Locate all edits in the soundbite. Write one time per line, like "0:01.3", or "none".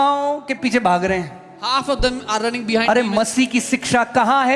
none